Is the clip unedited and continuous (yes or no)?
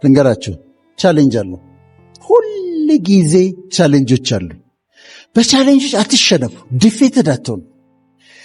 yes